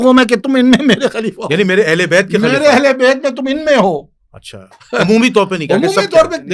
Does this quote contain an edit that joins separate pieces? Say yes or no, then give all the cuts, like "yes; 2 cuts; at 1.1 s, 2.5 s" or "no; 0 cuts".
no; 0 cuts